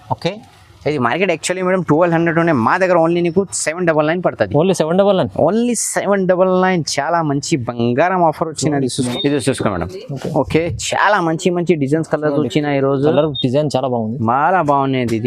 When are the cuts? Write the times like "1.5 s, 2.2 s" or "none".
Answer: 8.9 s